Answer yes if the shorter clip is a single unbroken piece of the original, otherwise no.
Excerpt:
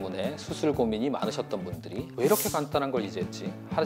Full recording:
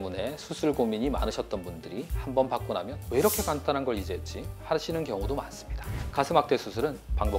no